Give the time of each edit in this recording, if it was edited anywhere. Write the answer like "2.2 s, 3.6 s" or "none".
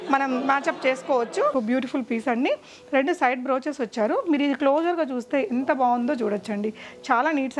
1.5 s